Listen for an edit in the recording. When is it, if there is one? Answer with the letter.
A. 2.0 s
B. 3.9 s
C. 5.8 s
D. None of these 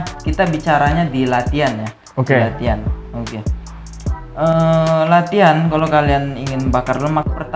D